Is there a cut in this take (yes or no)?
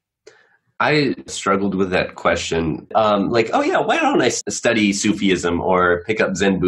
yes